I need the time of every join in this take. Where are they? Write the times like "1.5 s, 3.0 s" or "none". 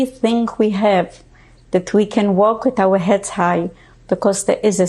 none